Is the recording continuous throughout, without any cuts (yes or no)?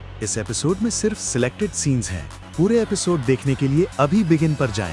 yes